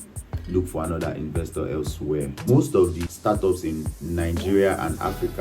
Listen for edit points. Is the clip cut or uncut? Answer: cut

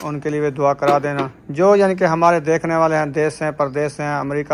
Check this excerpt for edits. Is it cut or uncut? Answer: uncut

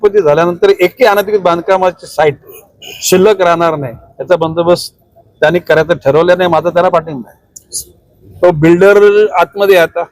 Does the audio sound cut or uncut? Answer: cut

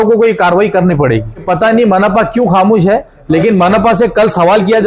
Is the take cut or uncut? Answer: cut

